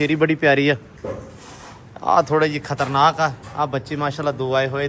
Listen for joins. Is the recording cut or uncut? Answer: uncut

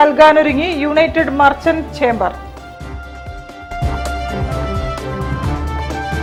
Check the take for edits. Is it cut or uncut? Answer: uncut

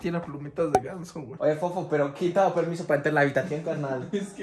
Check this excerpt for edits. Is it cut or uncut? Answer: cut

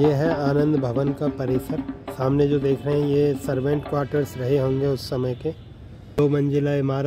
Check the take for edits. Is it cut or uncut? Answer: cut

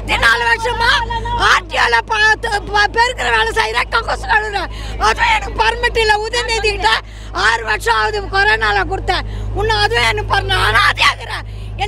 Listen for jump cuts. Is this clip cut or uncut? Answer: uncut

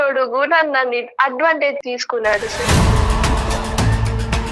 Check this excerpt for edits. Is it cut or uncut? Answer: cut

